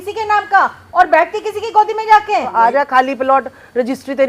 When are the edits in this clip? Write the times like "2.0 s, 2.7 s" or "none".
2.5 s